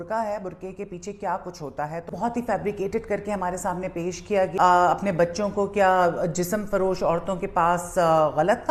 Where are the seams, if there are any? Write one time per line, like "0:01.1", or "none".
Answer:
0:02.1
0:04.5